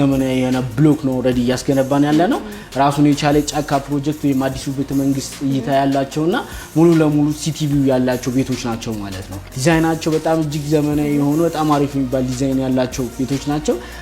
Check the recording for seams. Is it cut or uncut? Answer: cut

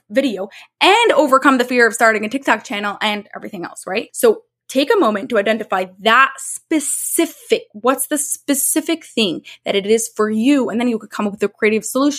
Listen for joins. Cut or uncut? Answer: cut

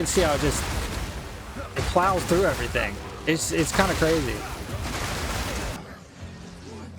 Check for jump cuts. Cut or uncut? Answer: cut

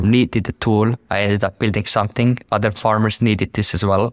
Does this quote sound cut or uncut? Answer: uncut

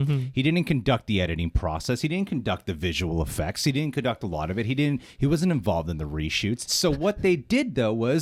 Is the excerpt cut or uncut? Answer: uncut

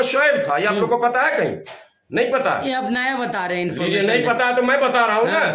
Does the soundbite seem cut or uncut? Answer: uncut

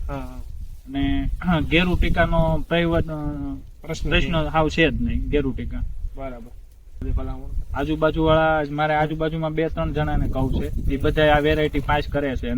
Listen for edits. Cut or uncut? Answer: cut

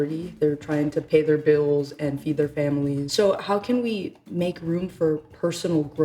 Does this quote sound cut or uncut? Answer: cut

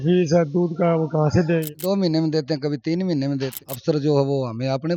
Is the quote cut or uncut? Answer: cut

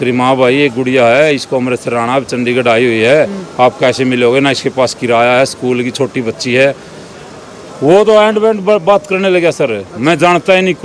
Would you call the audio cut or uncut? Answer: uncut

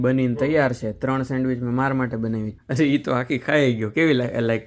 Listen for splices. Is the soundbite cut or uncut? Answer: cut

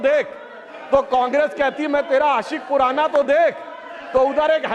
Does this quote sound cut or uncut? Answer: uncut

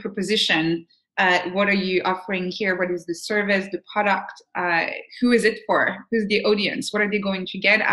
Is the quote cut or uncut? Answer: uncut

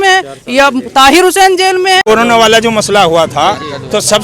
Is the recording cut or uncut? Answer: cut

